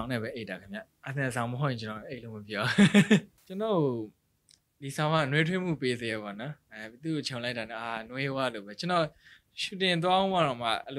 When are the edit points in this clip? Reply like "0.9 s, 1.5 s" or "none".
3.4 s